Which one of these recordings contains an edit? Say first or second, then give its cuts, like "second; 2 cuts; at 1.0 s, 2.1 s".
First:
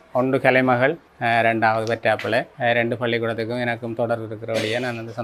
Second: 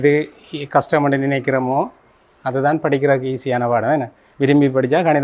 first; 2 cuts; at 1.1 s, 2.5 s